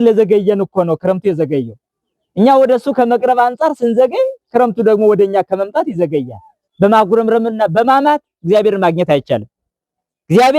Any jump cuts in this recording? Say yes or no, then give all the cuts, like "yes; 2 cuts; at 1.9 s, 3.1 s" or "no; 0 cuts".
yes; 1 cut; at 6.6 s